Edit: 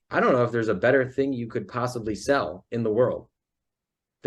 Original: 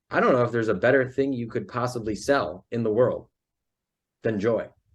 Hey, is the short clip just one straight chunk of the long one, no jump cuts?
yes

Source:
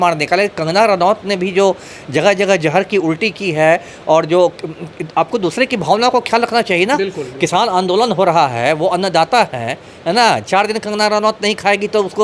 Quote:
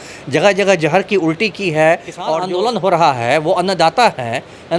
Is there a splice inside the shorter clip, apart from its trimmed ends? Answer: yes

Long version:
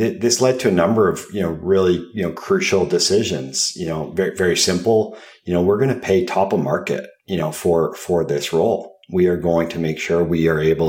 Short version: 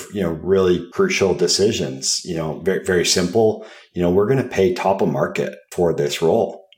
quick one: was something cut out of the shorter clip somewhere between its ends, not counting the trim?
yes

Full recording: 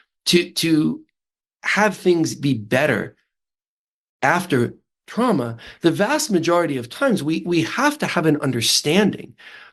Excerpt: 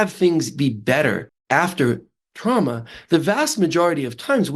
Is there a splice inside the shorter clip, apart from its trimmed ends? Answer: yes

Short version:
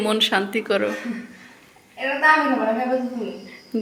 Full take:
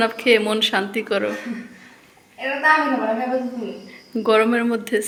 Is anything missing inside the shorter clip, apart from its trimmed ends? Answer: no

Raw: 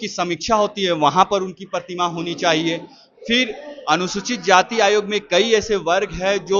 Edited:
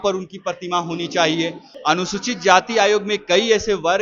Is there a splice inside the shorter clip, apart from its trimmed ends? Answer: yes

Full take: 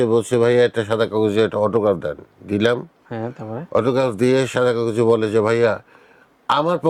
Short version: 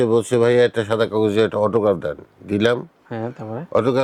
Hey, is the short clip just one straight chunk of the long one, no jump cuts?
yes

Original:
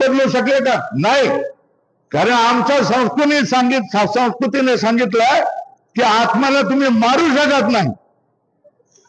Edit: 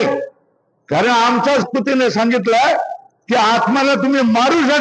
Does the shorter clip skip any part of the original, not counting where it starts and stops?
yes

